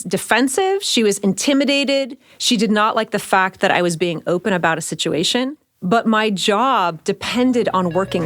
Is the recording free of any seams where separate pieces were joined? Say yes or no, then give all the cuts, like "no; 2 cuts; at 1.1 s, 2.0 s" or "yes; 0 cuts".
yes; 0 cuts